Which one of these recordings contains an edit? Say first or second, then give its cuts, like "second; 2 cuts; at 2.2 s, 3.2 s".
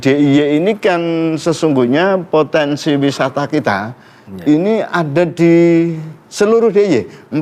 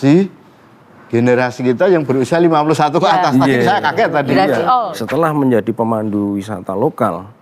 second; 1 cut; at 5.0 s